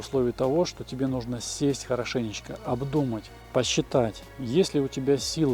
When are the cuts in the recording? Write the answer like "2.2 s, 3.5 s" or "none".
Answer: 3.3 s, 4.3 s